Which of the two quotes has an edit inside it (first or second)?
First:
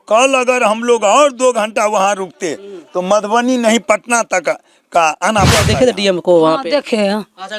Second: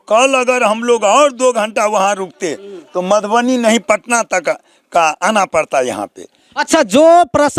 first